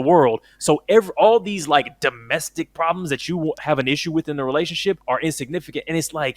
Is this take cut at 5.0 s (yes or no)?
yes